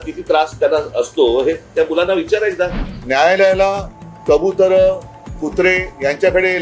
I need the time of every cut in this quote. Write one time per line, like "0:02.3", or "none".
0:02.9